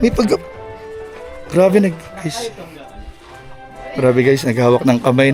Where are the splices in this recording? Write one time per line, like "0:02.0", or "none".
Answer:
none